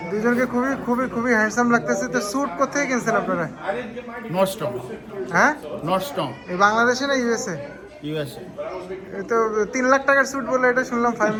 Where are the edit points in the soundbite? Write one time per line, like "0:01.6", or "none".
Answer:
none